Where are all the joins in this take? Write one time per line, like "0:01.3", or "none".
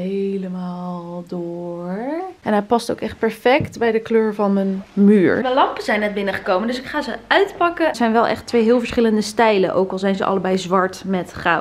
0:02.3
0:05.4
0:08.0